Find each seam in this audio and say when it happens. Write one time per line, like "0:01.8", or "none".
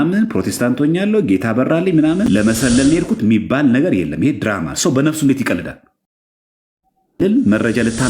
0:02.3
0:07.2